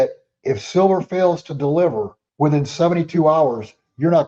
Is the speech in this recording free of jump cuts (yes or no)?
no